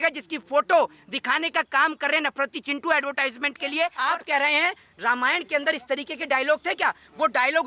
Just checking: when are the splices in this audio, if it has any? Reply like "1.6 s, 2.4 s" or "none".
4.0 s

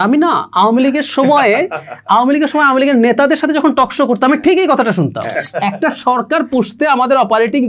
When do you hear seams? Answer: 5.3 s

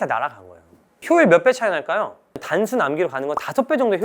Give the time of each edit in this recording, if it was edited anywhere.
0.9 s, 2.3 s

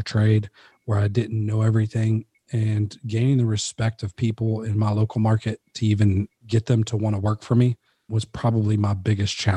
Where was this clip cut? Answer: 6.4 s, 8.1 s

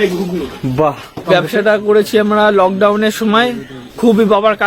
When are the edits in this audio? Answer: 1.1 s

